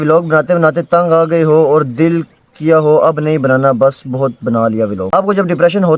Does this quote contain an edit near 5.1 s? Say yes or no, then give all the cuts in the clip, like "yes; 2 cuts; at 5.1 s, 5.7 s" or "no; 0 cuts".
yes; 1 cut; at 5.1 s